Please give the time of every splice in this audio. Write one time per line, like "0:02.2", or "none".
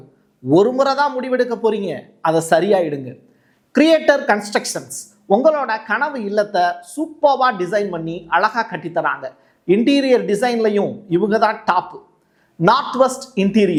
none